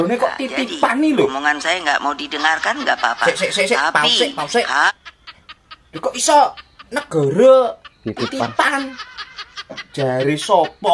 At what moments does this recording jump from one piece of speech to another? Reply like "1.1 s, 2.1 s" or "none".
none